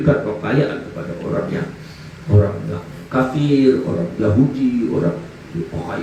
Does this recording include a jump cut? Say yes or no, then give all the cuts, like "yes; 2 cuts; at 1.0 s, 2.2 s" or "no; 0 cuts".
no; 0 cuts